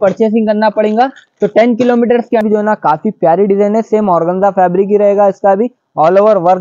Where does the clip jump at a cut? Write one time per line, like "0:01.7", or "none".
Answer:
0:02.4